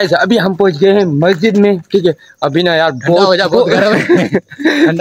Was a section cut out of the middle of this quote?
no; 0 cuts

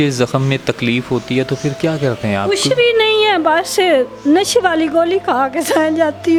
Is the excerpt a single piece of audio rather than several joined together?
yes; 0 cuts

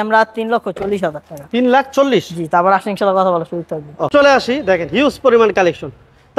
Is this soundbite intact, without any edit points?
no; 1 cut; at 4.1 s

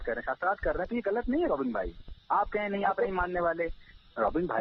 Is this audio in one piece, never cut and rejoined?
yes; 0 cuts

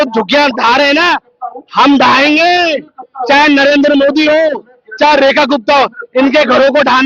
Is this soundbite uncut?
yes; 0 cuts

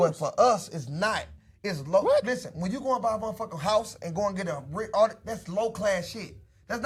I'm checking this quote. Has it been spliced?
no; 0 cuts

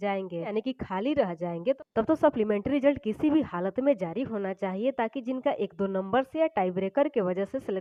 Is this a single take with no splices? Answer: yes; 0 cuts

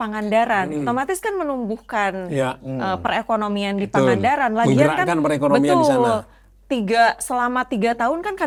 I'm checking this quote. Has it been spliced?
no; 0 cuts

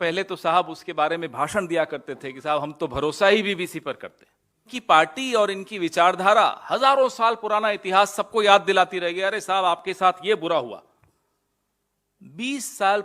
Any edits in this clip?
yes; 1 cut; at 4.7 s

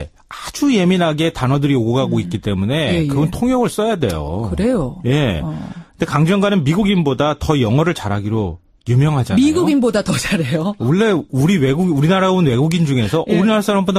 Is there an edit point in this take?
no; 0 cuts

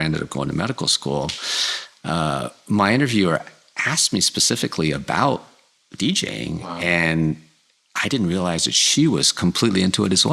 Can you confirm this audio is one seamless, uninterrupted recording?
yes; 0 cuts

